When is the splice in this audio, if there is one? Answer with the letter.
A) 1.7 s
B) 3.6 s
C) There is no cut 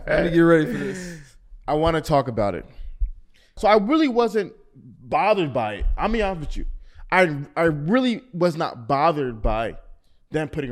B